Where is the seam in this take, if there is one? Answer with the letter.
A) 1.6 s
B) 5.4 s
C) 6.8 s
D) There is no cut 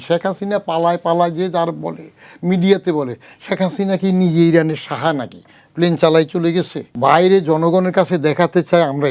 C